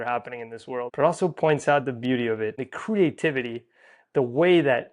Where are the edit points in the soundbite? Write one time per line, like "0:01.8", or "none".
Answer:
0:00.9
0:02.6